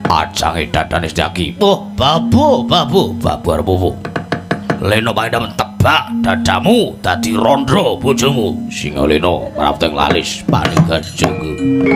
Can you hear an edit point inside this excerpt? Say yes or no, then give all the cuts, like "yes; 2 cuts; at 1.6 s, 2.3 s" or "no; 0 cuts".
no; 0 cuts